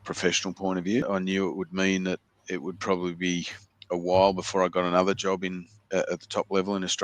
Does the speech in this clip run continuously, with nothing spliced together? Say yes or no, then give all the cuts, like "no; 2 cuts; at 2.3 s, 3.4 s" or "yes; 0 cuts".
no; 1 cut; at 1.1 s